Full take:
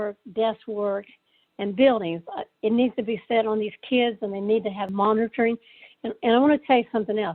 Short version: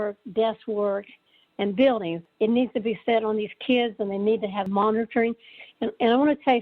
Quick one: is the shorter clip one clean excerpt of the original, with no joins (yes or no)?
no